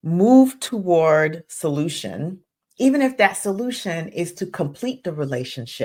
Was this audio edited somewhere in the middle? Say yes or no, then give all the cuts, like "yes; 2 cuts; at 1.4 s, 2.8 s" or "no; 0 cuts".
no; 0 cuts